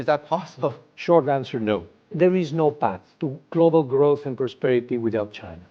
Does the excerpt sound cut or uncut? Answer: cut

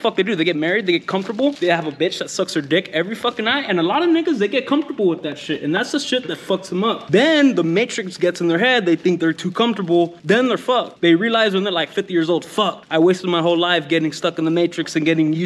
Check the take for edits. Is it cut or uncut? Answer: cut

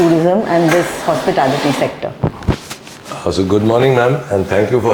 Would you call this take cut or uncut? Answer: uncut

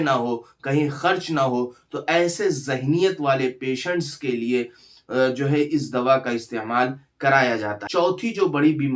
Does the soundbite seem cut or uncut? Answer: cut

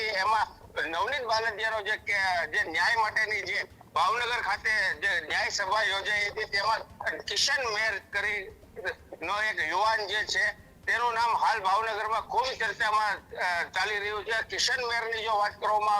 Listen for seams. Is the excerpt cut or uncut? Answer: uncut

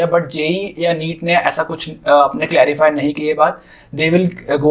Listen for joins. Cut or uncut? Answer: uncut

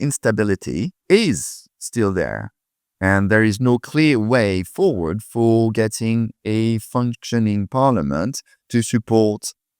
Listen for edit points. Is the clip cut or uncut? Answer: cut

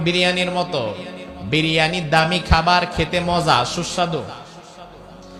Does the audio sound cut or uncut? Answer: uncut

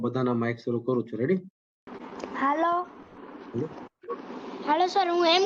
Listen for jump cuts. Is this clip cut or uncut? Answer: uncut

